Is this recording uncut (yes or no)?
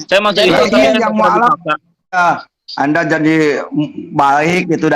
no